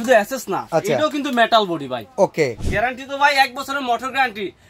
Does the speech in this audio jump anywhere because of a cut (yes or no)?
yes